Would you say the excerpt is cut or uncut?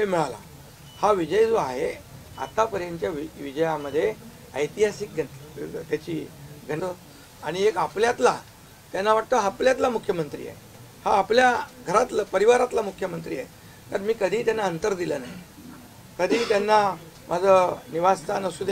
cut